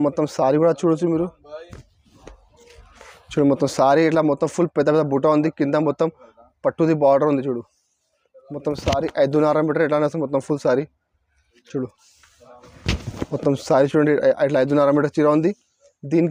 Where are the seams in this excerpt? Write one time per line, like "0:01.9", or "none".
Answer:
none